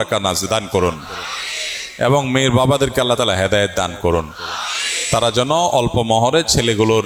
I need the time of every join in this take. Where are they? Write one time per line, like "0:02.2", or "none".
none